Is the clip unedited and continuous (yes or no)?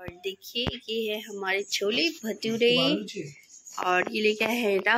yes